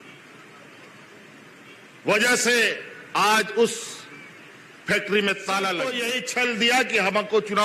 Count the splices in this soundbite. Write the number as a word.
one